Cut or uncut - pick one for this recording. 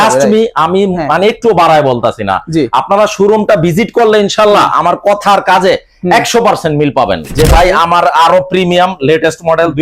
cut